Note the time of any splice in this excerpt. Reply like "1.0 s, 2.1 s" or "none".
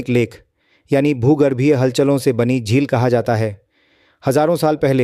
none